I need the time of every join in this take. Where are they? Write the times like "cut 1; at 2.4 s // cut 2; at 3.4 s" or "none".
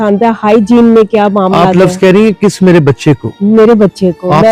none